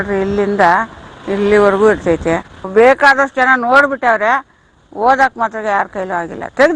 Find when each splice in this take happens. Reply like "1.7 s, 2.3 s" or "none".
2.5 s